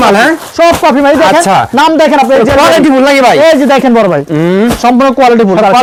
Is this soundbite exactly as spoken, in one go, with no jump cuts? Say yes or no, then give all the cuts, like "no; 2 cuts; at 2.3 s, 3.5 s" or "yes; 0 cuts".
yes; 0 cuts